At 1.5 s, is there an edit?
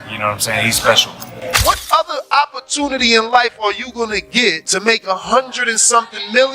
yes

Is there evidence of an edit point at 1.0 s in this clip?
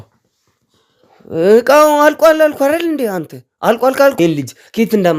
no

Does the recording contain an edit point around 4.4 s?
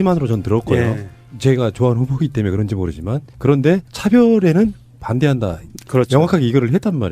no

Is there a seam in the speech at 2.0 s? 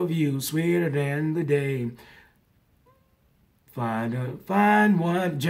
no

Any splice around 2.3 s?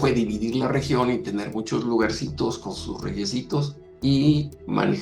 no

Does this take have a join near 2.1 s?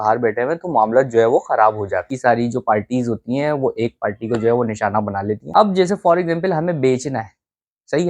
yes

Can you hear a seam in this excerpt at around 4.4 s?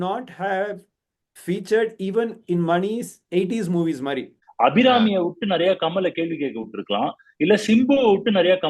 yes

